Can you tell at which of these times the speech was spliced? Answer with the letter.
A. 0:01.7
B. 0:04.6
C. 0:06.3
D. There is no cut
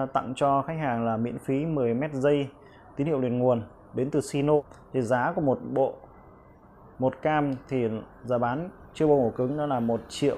B